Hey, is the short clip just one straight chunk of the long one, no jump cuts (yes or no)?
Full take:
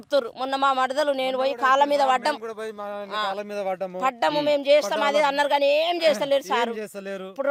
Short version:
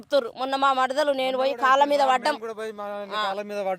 yes